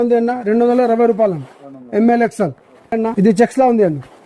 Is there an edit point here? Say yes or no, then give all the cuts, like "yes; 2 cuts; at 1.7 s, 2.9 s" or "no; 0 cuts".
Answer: yes; 1 cut; at 3.0 s